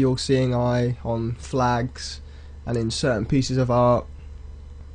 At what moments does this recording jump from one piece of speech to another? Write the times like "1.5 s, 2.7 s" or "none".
3.2 s